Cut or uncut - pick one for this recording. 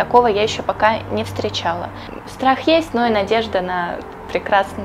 cut